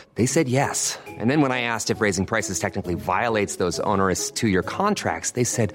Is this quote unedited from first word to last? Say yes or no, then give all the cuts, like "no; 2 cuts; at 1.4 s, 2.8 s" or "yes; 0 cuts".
yes; 0 cuts